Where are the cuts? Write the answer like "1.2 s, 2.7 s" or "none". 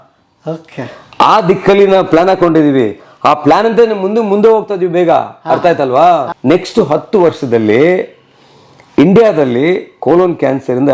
6.3 s